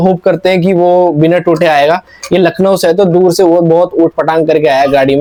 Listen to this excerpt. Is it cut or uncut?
uncut